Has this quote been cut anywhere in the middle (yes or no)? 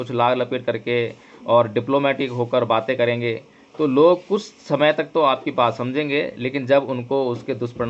no